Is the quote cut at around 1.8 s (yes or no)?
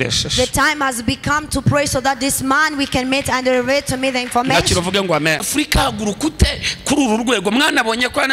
no